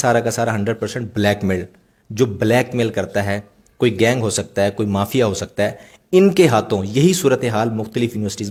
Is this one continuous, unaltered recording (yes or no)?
yes